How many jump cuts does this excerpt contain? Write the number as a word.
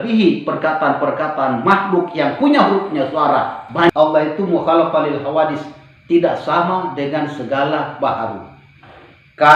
one